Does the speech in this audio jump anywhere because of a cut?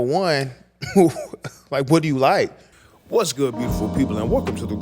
yes; 1 cut; at 2.7 s

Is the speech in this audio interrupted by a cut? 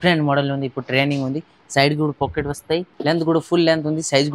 yes; 1 cut; at 2.9 s

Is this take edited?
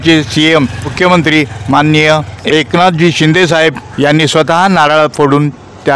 yes; 3 cuts; at 0.9 s, 2.3 s, 3.8 s

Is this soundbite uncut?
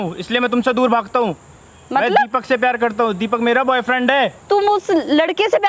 no; 1 cut; at 4.4 s

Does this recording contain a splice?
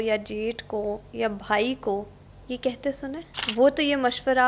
yes; 1 cut; at 3.3 s

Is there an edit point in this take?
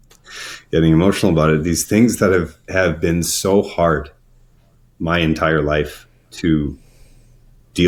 no; 0 cuts

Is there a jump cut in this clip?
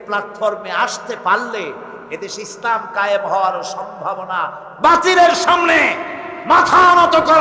yes; 1 cut; at 4.6 s

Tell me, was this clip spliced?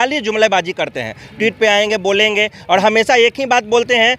no; 0 cuts

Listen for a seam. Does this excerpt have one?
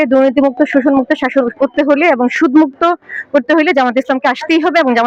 no; 0 cuts

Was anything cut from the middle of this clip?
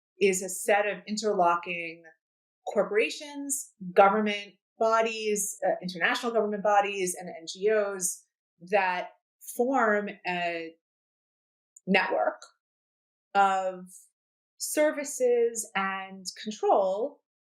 yes; 1 cut; at 4.7 s

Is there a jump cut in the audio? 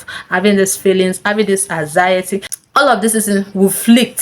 yes; 1 cut; at 2.5 s

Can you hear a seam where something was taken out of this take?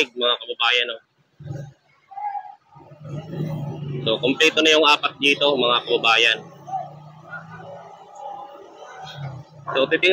no; 0 cuts

